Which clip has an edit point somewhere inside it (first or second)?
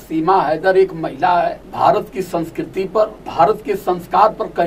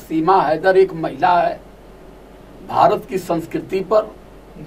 first